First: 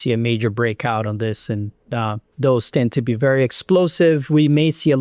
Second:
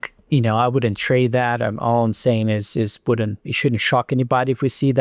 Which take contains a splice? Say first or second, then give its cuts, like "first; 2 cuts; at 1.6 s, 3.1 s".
second; 1 cut; at 3.4 s